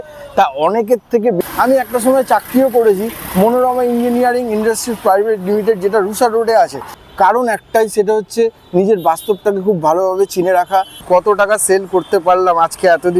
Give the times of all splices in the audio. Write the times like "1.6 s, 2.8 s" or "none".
1.4 s, 6.9 s, 11.0 s